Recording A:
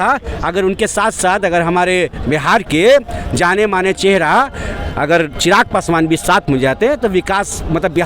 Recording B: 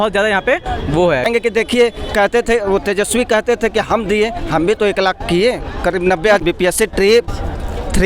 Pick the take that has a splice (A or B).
B